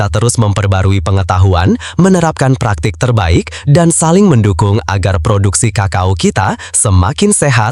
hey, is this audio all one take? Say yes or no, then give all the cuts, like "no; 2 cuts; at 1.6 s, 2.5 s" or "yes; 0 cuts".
yes; 0 cuts